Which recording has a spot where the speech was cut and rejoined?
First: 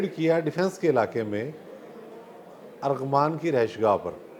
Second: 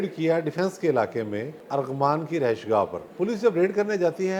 second; 2 cuts; at 1.6 s, 3.0 s

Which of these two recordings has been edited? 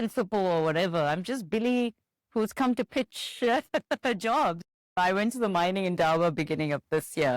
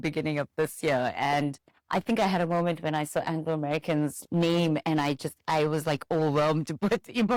first; 1 cut; at 4.9 s

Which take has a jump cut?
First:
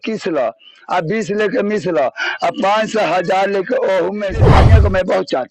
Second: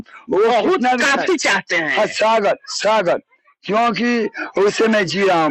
first; 1 cut; at 4.5 s

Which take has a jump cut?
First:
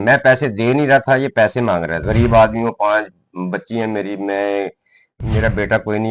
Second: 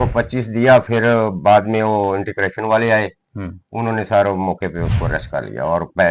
first; 1 cut; at 2.1 s

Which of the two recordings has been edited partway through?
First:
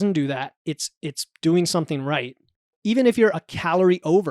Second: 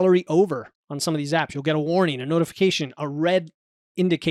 first; 1 cut; at 2.7 s

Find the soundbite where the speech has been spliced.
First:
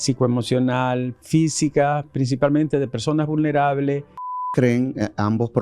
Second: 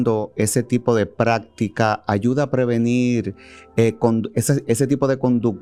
first; 1 cut; at 4.5 s

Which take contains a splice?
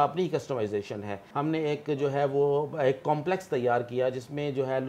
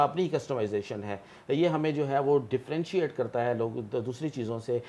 first; 1 cut; at 1.2 s

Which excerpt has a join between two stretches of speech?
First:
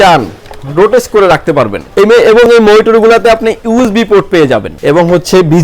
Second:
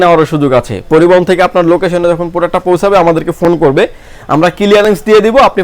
first; 2 cuts; at 1.8 s, 4.7 s

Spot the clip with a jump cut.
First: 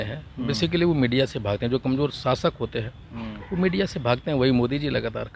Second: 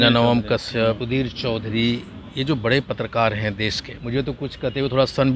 second; 2 cuts; at 1.0 s, 3.9 s

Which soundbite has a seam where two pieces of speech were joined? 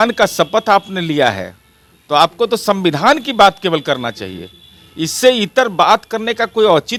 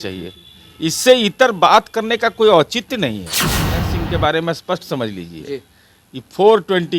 second; 1 cut; at 3.8 s

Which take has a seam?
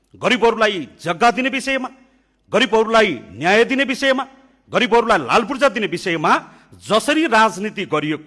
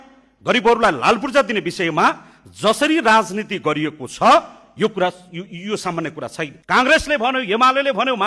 second; 1 cut; at 6.6 s

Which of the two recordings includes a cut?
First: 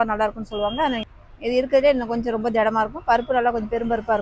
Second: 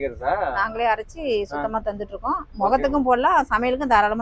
first; 1 cut; at 1.2 s

